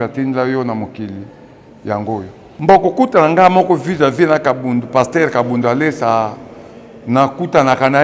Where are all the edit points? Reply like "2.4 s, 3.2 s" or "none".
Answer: 2.4 s